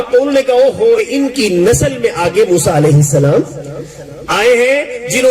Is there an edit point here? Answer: yes; 1 cut; at 1.0 s

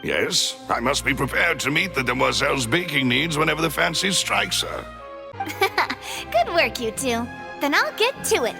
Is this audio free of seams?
no; 1 cut; at 5.2 s

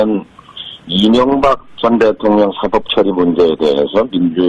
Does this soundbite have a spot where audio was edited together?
yes; 1 cut; at 1.7 s

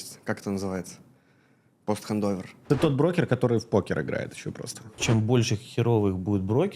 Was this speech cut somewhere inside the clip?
yes; 2 cuts; at 2.5 s, 5.0 s

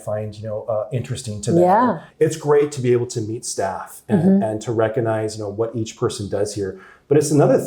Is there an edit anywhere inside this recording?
yes; 1 cut; at 2.1 s

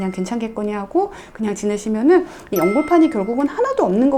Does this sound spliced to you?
no; 0 cuts

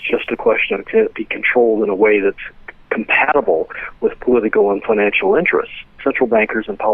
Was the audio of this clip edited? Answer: yes; 1 cut; at 5.9 s

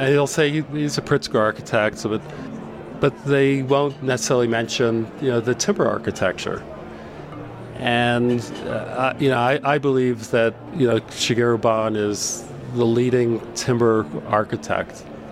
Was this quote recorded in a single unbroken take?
yes; 0 cuts

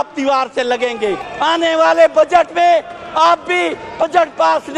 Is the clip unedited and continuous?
no; 1 cut; at 1.3 s

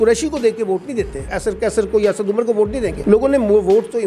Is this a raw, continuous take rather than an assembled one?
no; 2 cuts; at 1.3 s, 3.0 s

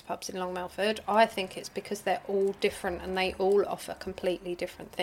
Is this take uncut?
yes; 0 cuts

